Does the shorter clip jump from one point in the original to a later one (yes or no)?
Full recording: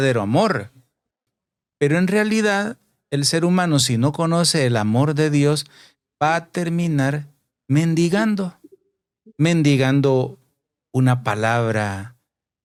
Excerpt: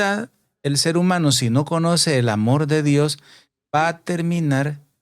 no